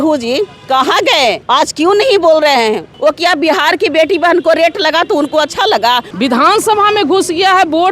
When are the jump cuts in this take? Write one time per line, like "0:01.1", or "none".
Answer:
0:01.4
0:02.9
0:06.1